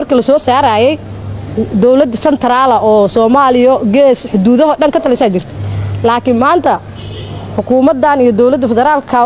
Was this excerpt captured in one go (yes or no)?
yes